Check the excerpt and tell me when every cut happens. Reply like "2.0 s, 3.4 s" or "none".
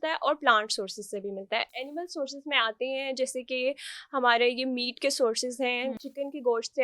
none